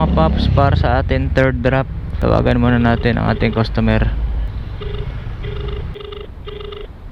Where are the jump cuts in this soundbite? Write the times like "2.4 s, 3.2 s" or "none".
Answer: 2.0 s, 4.5 s, 5.9 s